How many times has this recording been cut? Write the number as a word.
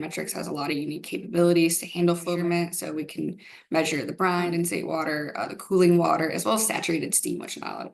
two